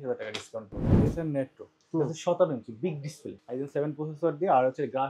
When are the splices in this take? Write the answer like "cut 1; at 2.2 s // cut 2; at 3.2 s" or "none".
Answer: cut 1; at 1.0 s // cut 2; at 3.3 s